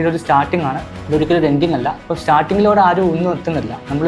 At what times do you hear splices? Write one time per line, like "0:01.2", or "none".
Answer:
0:00.9
0:02.0